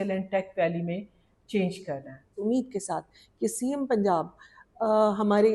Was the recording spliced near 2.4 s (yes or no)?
yes